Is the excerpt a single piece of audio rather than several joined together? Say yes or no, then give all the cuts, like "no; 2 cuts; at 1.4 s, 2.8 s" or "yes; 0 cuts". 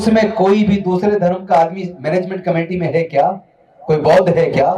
yes; 0 cuts